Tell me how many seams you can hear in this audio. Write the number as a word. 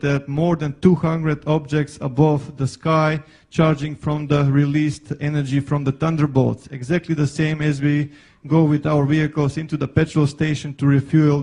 one